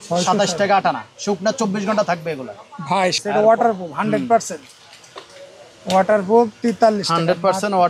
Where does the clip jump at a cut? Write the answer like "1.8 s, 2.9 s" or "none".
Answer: 3.2 s

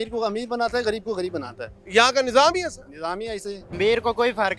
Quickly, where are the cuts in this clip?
3.7 s

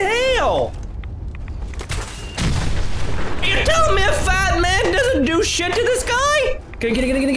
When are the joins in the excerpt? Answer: none

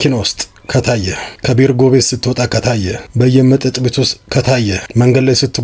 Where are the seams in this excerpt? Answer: 1.3 s, 2.7 s, 4.8 s

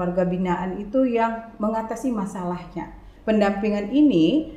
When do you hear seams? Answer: 3.1 s

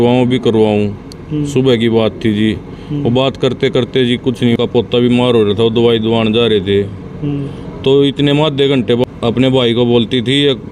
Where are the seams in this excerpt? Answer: 4.6 s, 9.0 s

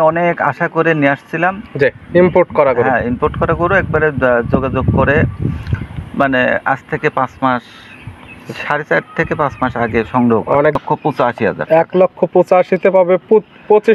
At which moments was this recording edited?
10.8 s

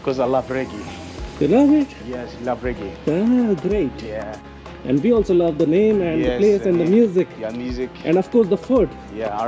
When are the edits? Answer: none

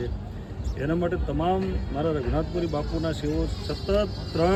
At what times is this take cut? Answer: none

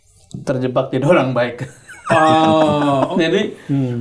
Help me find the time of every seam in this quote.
3.1 s

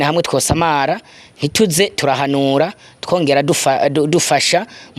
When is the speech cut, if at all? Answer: none

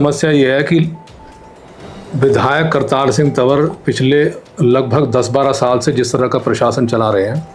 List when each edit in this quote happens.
none

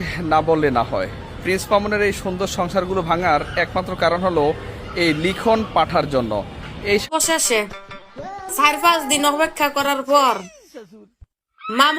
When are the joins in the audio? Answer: 7.1 s

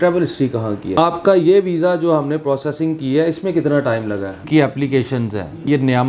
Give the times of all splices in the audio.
1.0 s, 4.4 s

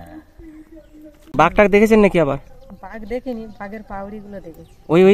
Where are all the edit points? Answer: 1.3 s

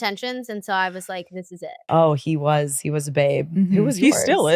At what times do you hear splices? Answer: 1.7 s

